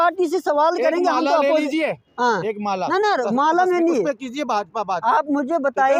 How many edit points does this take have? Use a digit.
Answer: 0